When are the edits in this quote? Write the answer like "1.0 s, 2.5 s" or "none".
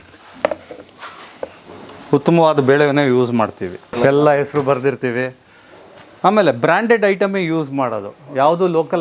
3.9 s